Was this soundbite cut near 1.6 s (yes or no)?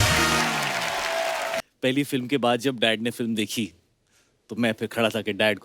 yes